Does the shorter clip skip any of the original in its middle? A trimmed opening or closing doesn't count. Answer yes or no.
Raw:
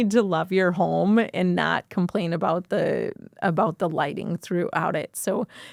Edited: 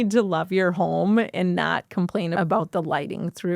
yes